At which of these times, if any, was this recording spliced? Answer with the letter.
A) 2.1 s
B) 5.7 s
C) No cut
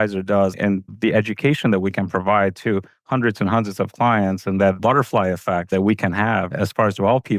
B